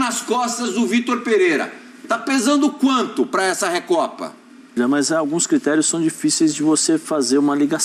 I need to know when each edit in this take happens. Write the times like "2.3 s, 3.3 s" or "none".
4.7 s